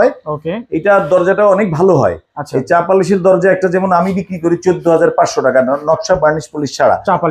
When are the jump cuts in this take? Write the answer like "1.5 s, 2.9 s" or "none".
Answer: none